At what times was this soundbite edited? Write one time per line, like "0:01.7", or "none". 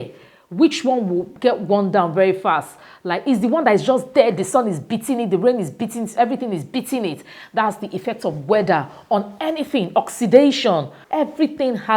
0:11.0